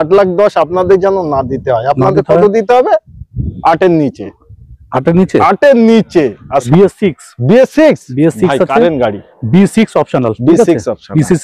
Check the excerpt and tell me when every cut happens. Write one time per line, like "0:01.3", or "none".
0:06.7